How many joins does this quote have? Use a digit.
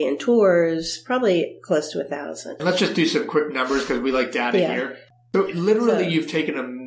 2